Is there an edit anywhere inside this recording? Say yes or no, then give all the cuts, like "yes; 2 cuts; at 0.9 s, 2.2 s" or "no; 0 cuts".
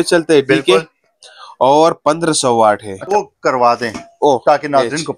yes; 1 cut; at 3.0 s